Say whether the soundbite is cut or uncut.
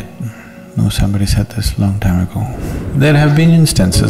cut